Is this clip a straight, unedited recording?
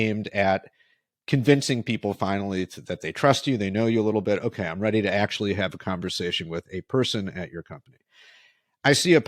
yes; 0 cuts

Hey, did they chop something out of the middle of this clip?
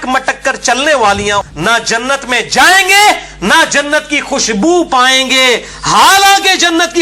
yes; 1 cut; at 1.4 s

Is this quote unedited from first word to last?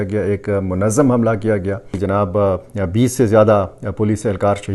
no; 1 cut; at 1.8 s

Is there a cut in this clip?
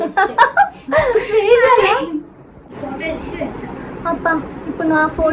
yes; 1 cut; at 2.8 s

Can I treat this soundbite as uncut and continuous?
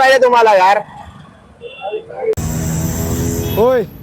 no; 1 cut; at 2.3 s

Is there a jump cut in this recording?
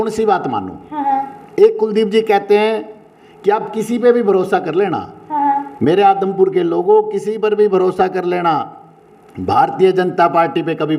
no; 0 cuts

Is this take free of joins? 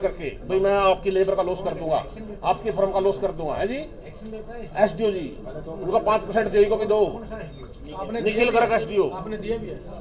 yes; 0 cuts

